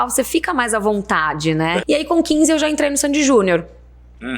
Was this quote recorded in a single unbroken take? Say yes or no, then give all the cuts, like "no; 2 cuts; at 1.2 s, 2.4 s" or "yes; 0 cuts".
no; 1 cut; at 1.8 s